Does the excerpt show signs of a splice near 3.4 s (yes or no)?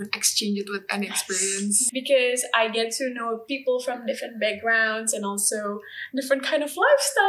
no